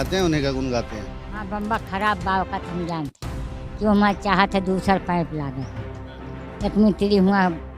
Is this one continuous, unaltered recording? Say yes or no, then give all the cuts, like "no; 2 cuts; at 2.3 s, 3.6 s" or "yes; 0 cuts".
no; 1 cut; at 1.5 s